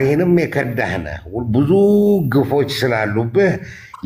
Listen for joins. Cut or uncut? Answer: uncut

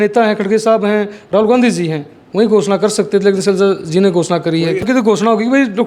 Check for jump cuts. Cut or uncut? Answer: cut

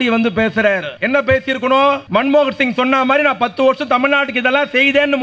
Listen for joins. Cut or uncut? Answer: cut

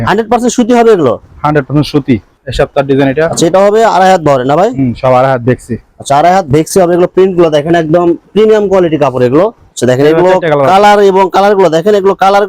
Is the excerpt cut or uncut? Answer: cut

